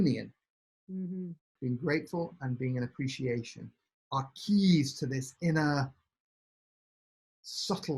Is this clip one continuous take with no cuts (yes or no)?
no